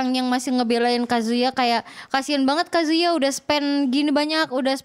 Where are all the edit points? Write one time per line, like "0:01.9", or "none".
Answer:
none